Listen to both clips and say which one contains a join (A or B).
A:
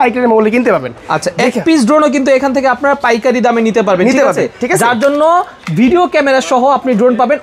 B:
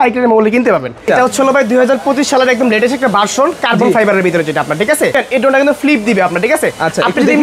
B